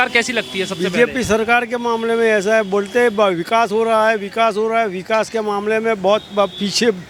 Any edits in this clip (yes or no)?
no